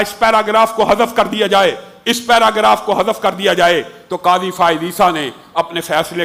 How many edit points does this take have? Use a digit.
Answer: 0